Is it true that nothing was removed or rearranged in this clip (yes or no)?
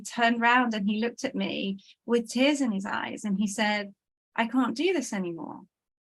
yes